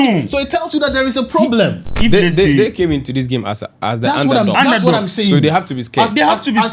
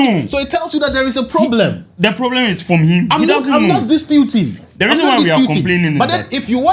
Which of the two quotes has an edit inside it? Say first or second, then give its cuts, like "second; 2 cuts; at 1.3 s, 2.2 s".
first; 1 cut; at 1.9 s